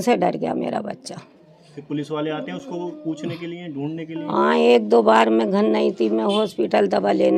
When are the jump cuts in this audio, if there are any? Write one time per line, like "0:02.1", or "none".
none